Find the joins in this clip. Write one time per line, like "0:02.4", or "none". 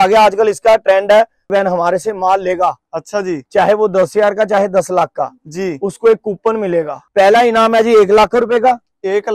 0:01.5
0:07.0